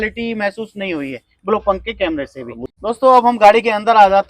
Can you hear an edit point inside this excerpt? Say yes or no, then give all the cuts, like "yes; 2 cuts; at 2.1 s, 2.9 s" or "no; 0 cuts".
yes; 1 cut; at 2.6 s